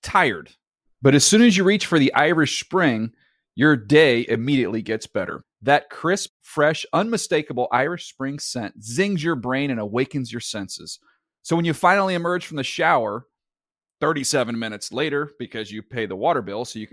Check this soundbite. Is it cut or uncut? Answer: uncut